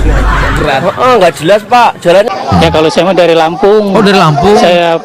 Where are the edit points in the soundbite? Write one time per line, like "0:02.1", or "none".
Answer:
0:02.3